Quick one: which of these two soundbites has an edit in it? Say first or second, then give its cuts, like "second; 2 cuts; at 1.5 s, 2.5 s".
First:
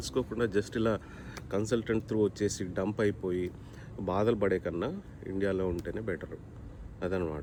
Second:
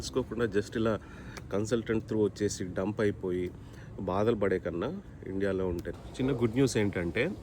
second; 1 cut; at 5.9 s